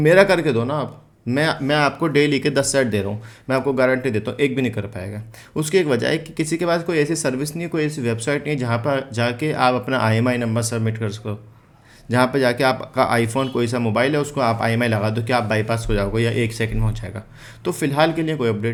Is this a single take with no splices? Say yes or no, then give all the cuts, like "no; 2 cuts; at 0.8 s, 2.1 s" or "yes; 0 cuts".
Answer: yes; 0 cuts